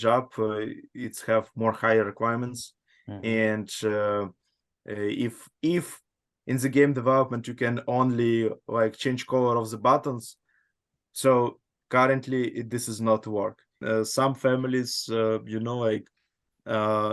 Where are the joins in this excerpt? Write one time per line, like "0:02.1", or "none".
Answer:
0:13.7